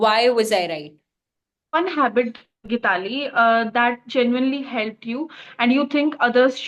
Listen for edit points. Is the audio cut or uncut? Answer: cut